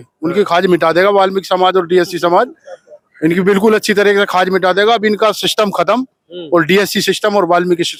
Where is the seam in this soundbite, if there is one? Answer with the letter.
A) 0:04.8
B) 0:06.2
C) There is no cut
C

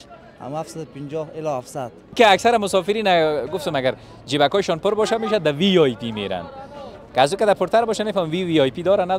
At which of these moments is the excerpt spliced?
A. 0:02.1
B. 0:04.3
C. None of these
A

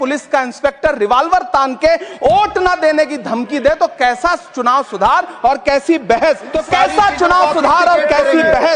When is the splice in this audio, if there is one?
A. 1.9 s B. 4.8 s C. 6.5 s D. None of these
C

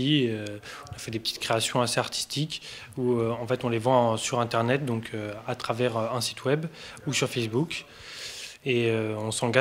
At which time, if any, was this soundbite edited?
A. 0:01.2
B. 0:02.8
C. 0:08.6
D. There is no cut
A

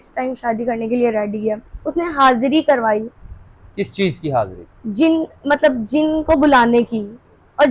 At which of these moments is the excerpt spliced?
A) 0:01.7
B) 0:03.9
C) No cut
A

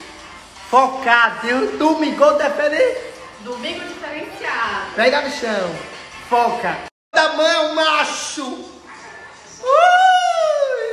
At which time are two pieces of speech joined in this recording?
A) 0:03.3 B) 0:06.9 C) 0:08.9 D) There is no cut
B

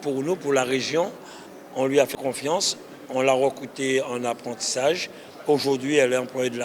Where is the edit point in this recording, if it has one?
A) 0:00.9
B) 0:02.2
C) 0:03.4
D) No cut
B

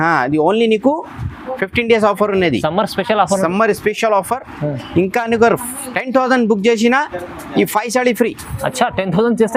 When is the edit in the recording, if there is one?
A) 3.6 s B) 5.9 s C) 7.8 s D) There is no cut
D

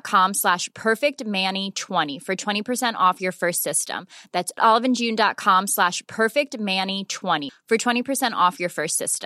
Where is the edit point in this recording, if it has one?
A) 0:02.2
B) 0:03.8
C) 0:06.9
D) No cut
A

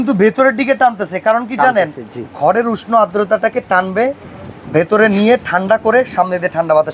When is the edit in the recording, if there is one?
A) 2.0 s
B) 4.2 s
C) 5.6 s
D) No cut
D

